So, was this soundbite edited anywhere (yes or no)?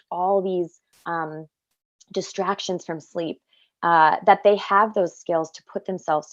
no